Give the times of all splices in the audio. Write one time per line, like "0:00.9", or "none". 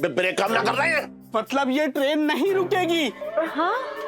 0:01.2